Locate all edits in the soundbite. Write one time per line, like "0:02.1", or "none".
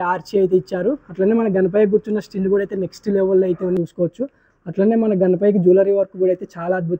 0:03.8